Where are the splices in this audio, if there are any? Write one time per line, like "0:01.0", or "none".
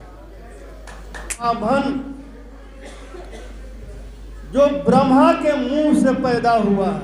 0:01.4